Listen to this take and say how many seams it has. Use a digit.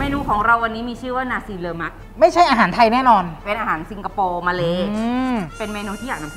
2